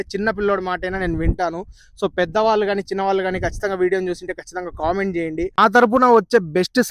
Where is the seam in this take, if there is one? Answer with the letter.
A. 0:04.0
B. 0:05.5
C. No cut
B